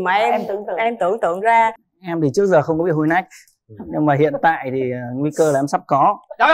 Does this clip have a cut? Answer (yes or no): yes